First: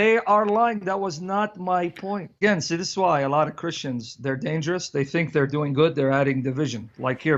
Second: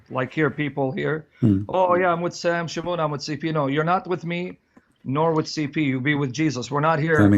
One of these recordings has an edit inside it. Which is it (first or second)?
first